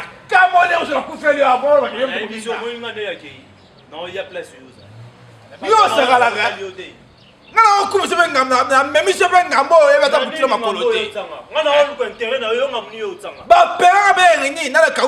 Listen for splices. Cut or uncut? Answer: uncut